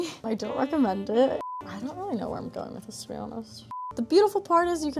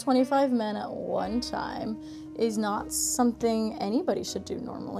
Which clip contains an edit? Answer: first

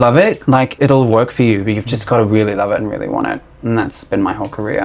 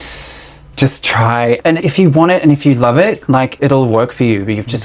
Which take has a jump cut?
second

